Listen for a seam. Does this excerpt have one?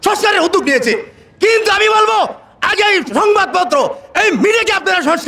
no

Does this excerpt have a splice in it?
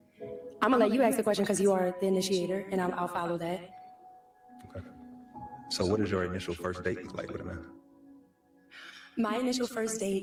no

